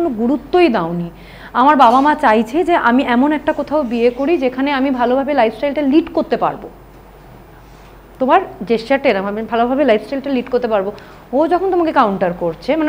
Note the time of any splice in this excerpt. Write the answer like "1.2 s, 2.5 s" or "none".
none